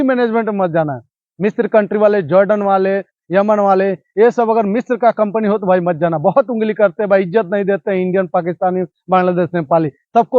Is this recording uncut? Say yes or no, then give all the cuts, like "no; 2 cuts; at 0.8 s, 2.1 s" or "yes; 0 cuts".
yes; 0 cuts